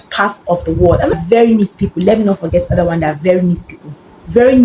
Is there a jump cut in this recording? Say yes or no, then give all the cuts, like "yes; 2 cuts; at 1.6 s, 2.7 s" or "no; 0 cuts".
yes; 1 cut; at 1.2 s